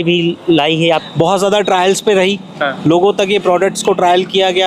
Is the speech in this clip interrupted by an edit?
yes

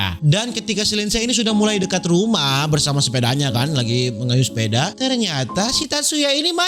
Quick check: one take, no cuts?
yes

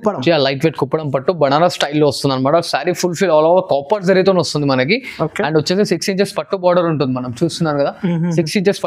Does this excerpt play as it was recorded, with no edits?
yes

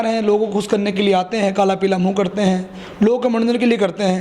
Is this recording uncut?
yes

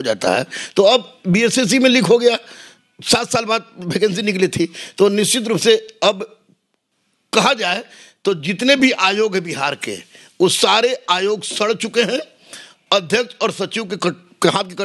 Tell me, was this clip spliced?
no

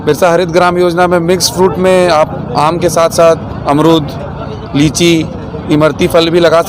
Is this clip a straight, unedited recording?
yes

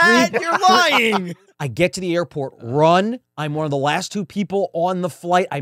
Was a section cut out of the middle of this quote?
yes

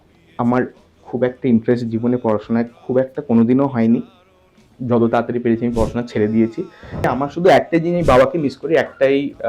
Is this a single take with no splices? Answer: no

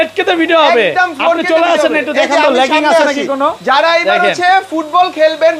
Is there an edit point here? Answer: no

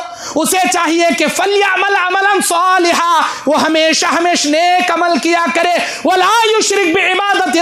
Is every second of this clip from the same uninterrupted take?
yes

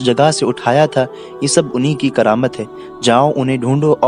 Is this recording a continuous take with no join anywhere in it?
yes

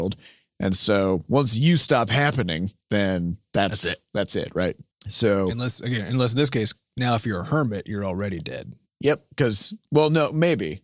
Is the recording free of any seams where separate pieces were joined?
no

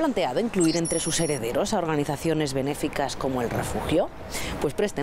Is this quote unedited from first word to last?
yes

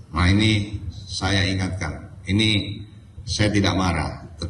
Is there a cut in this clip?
no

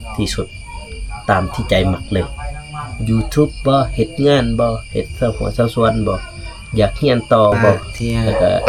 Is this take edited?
no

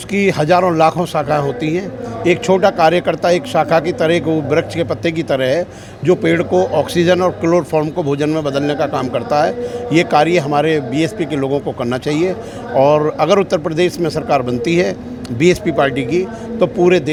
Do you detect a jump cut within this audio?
no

